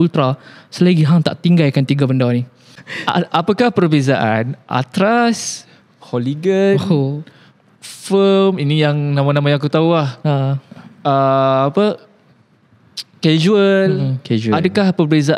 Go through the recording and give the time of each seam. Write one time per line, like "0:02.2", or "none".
0:02.8